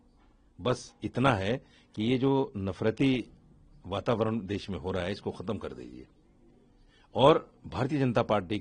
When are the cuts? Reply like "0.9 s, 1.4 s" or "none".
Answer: none